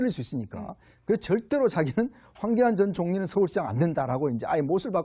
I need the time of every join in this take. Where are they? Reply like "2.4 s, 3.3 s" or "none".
4.1 s